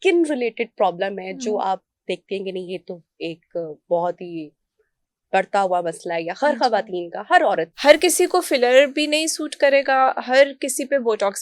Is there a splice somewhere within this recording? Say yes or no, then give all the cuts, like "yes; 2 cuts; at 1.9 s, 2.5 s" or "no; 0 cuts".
yes; 1 cut; at 7.7 s